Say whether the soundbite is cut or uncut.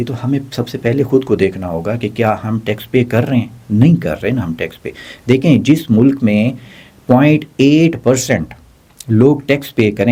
uncut